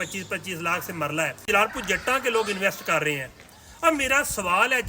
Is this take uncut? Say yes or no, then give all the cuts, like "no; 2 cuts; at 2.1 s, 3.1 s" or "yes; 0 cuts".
no; 1 cut; at 1.4 s